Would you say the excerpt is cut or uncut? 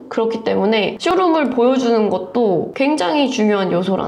cut